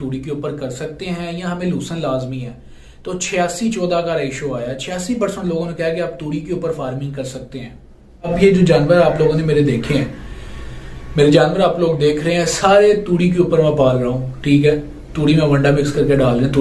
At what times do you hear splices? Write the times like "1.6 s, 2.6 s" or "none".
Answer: 8.2 s